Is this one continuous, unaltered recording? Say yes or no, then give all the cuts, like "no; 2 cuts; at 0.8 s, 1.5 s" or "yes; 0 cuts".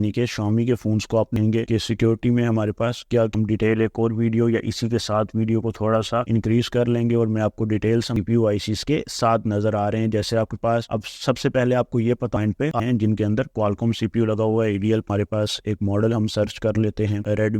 no; 5 cuts; at 1.3 s, 3.3 s, 8.1 s, 12.6 s, 15.1 s